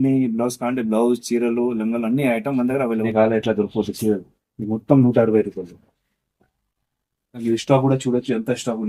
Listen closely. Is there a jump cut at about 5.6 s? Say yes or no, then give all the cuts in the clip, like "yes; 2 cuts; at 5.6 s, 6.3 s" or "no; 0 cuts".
no; 2 cuts; at 3.1 s, 7.4 s